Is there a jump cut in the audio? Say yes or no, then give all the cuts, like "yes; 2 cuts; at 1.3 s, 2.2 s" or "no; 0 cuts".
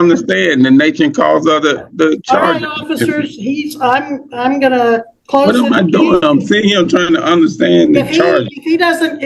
no; 0 cuts